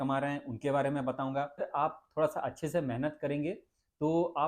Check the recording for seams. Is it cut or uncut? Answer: cut